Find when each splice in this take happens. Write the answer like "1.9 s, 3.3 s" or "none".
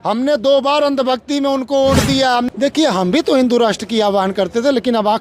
2.5 s